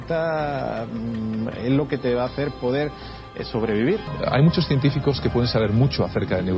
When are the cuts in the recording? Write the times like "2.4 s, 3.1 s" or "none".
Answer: 4.1 s